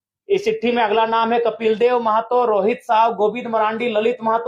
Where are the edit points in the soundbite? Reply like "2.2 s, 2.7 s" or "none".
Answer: none

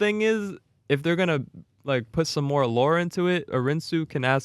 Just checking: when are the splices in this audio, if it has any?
3.5 s

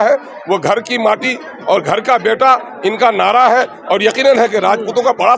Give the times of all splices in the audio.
none

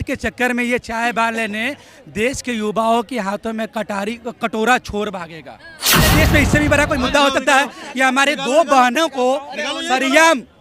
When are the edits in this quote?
6.1 s

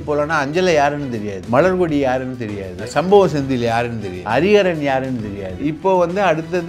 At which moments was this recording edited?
1.3 s, 2.8 s, 4.1 s, 5.5 s

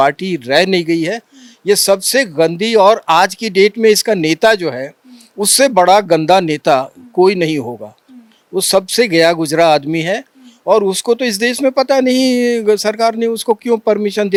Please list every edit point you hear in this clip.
none

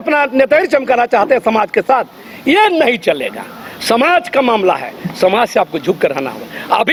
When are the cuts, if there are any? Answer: none

